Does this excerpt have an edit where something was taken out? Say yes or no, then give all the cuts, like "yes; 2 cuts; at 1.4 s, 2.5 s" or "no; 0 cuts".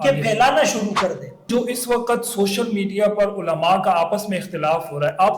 yes; 1 cut; at 1.5 s